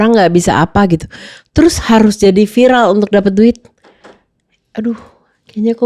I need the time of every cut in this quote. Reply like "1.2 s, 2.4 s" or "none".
none